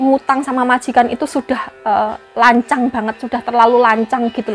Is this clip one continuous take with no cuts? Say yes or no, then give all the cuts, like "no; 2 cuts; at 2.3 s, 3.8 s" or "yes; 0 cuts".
yes; 0 cuts